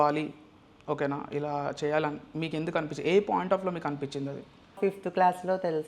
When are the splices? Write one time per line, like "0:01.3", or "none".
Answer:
0:04.8